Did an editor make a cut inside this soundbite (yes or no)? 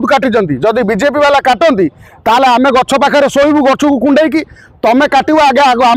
no